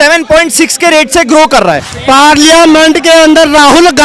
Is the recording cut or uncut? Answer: cut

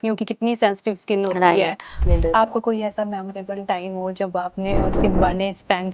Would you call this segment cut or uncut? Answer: cut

